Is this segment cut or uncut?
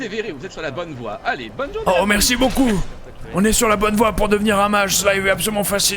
cut